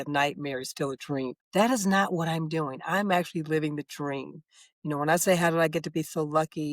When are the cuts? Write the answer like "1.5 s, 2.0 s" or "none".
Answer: 1.4 s